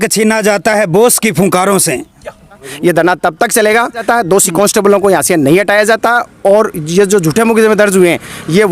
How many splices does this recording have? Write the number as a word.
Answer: two